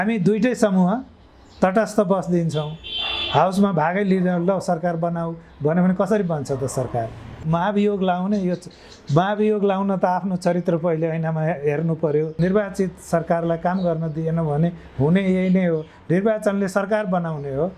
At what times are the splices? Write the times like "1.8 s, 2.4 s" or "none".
7.4 s, 12.3 s